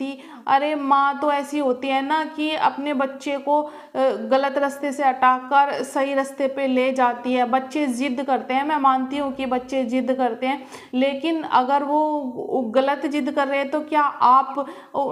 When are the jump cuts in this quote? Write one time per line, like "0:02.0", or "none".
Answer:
none